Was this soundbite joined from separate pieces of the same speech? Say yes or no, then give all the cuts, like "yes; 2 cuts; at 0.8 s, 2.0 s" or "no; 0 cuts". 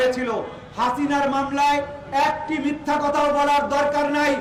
no; 0 cuts